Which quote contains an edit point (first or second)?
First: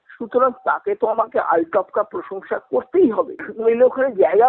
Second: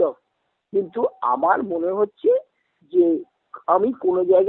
first